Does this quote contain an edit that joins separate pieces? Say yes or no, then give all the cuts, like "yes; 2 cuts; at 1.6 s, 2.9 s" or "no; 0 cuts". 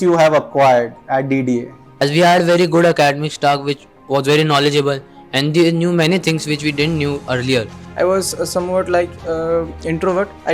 yes; 2 cuts; at 1.8 s, 7.8 s